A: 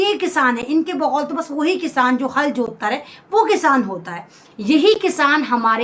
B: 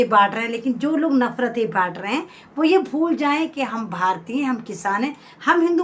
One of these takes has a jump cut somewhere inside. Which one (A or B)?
A